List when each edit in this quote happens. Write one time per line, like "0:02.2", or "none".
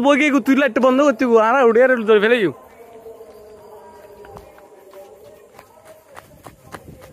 none